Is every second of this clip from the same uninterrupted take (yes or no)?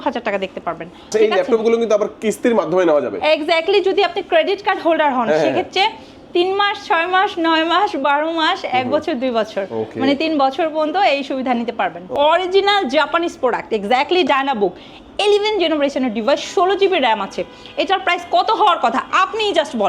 no